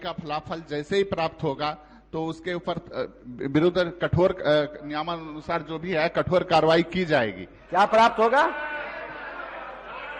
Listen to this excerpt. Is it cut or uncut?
uncut